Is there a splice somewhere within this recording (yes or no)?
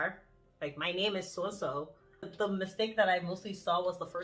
yes